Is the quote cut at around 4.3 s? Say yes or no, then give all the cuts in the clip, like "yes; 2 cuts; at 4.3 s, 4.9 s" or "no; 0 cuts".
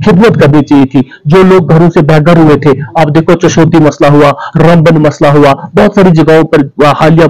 no; 0 cuts